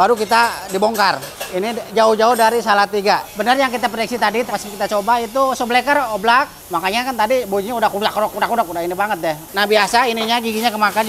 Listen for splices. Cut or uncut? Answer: cut